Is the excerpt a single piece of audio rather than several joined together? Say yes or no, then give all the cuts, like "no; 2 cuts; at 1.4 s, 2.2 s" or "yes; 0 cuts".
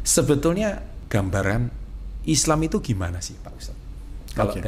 no; 1 cut; at 0.9 s